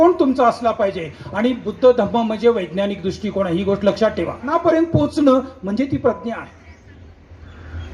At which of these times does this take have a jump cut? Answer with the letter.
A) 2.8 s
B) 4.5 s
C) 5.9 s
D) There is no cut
B